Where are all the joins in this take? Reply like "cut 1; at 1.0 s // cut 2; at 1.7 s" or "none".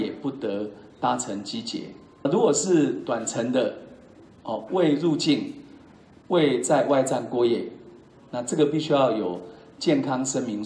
cut 1; at 2.3 s